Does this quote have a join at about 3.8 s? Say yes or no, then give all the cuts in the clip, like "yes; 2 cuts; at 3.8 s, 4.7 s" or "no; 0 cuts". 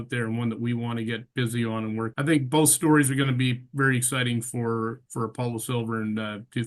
no; 1 cut; at 2.1 s